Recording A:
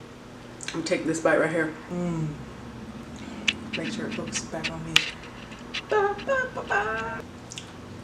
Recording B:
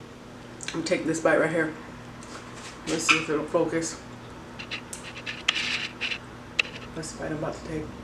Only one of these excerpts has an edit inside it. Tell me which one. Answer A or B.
A